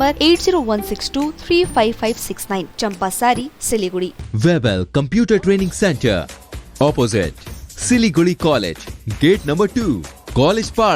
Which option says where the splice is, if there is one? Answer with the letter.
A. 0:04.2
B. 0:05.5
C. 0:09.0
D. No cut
A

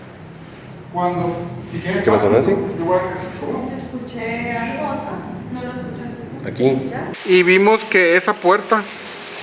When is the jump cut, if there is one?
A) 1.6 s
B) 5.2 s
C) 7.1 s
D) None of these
C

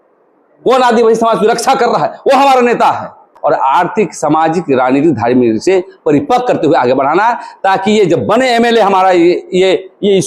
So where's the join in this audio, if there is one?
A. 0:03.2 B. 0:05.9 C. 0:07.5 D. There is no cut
A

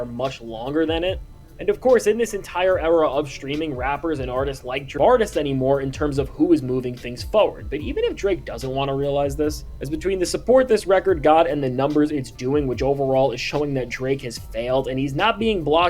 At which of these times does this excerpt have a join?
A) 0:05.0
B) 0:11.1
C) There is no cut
A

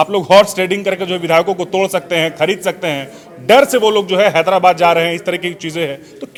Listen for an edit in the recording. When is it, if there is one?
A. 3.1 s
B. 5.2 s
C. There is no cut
C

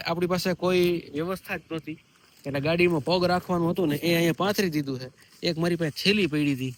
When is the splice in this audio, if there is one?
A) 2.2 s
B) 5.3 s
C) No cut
C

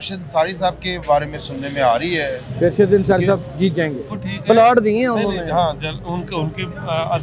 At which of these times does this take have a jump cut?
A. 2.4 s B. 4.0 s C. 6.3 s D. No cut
B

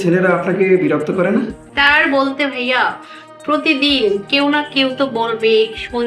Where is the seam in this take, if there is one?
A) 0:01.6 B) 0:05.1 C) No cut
A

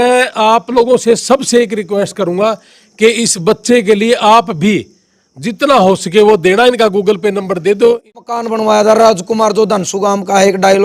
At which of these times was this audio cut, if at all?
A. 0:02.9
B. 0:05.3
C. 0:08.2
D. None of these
C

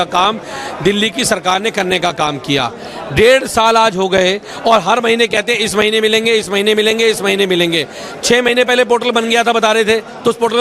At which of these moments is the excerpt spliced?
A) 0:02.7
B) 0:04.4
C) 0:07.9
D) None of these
D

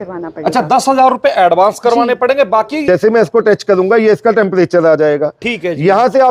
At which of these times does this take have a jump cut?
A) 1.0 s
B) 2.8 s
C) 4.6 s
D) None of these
B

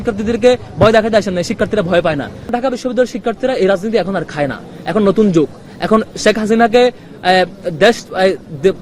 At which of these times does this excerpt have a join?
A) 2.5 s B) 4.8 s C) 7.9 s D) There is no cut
A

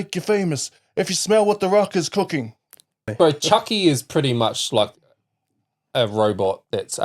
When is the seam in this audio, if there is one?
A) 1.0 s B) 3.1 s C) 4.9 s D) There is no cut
B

